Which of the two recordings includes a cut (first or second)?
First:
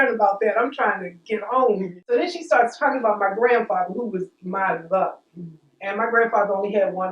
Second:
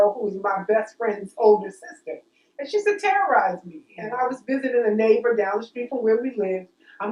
first